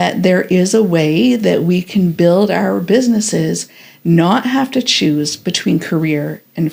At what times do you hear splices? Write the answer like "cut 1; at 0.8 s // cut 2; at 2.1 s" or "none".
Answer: none

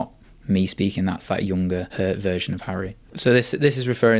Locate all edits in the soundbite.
cut 1; at 1.9 s // cut 2; at 3.0 s

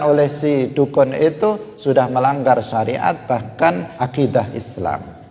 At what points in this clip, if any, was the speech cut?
cut 1; at 3.9 s

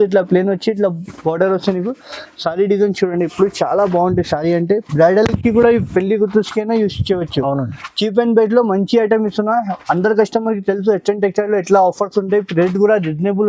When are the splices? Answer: none

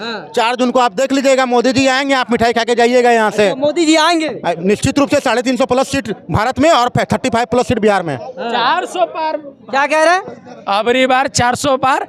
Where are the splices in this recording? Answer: none

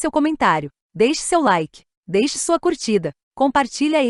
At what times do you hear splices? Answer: none

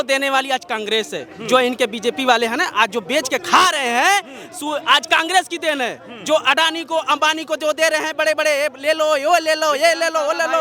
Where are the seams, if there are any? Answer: none

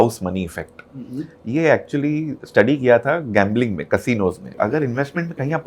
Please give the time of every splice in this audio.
cut 1; at 4.5 s

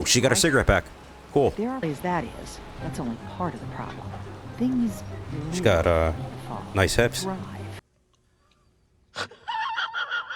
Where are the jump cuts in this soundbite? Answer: cut 1; at 1.8 s

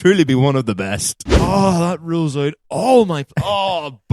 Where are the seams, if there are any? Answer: cut 1; at 1.4 s

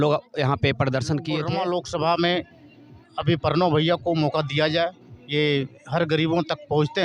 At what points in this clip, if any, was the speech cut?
cut 1; at 1.4 s

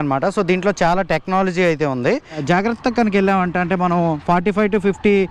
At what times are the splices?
cut 1; at 2.4 s

